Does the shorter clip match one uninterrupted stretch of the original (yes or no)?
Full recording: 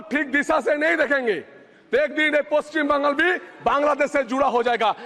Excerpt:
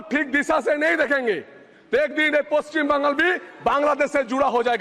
yes